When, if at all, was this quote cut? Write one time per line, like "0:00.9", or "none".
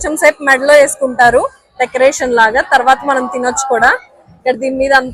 none